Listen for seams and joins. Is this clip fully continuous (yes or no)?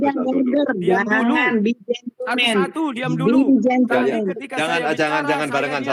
yes